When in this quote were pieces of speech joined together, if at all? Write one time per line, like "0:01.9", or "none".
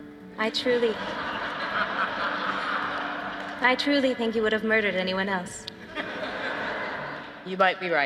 none